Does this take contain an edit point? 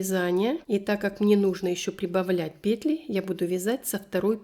no; 0 cuts

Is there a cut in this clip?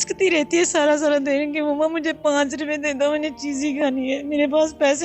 no; 0 cuts

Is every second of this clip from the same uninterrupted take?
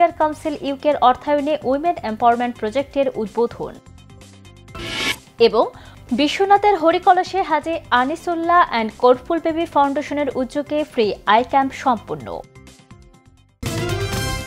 no; 1 cut; at 13.6 s

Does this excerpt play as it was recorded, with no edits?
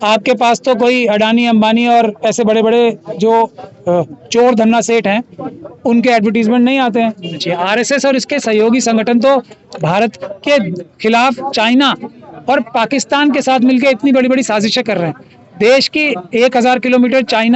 no; 1 cut; at 7.4 s

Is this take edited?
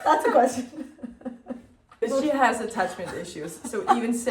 yes; 1 cut; at 2.0 s

